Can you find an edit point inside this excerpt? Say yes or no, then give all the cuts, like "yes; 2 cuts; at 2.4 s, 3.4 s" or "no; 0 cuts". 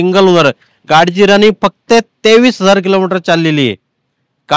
no; 0 cuts